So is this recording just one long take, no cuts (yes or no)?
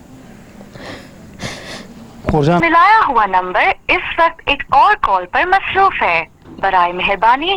no